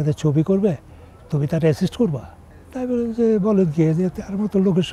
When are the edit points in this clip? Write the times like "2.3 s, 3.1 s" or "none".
none

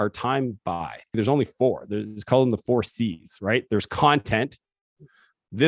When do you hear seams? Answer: 1.2 s

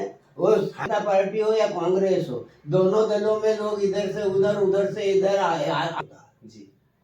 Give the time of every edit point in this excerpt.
0.9 s, 6.0 s

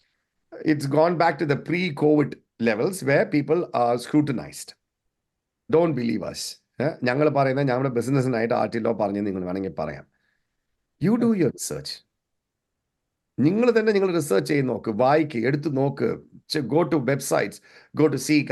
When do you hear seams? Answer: 5.7 s

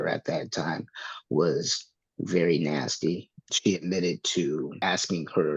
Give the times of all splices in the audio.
3.4 s, 4.8 s

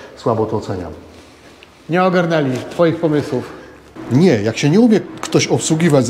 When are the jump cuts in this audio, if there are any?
3.9 s

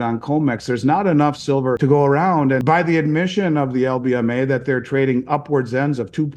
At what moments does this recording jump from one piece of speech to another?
1.8 s, 2.6 s

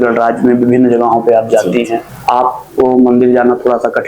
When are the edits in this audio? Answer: 2.1 s

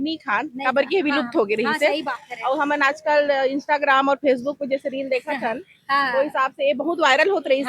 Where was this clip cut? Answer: none

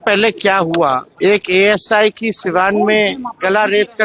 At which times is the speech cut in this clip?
1.1 s

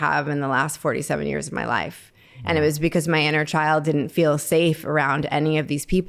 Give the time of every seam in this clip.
none

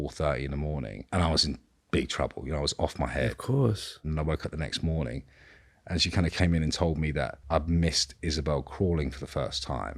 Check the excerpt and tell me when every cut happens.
1.0 s, 4.0 s, 7.4 s

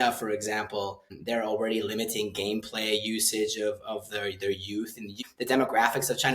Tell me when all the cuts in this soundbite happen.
1.1 s, 5.2 s

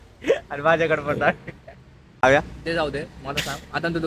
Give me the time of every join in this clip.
2.0 s

